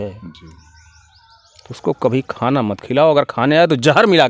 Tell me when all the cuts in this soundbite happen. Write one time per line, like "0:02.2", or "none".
none